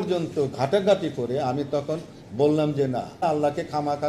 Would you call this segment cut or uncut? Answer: cut